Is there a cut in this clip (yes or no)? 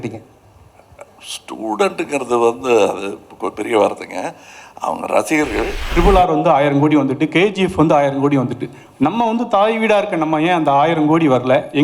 yes